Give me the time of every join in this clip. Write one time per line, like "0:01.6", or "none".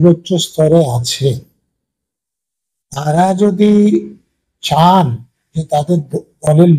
none

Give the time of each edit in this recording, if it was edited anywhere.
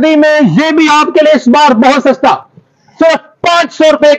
none

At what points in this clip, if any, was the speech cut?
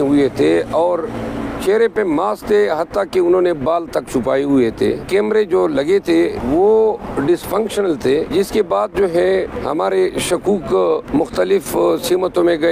0:05.0
0:06.4
0:08.3
0:09.6
0:11.1

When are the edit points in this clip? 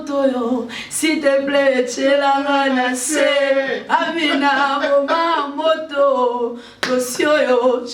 none

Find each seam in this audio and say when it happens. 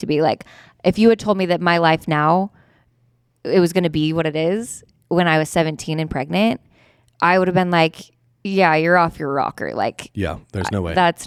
none

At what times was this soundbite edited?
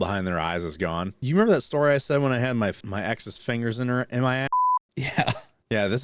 0:01.2
0:02.8
0:04.5

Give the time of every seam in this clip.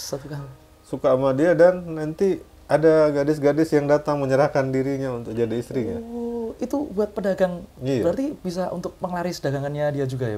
none

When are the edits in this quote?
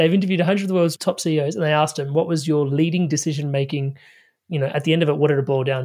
0:01.0

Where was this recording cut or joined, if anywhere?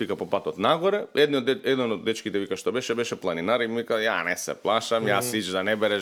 none

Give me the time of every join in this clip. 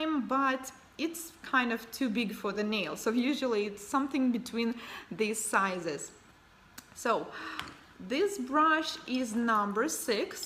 0:03.4

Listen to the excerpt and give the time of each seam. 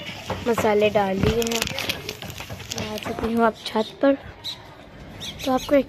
0:03.1

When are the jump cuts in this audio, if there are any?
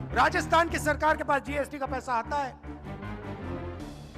0:02.6

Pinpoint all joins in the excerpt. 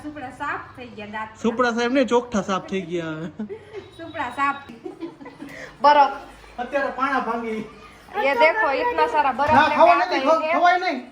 0:04.7

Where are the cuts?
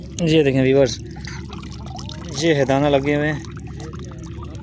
none

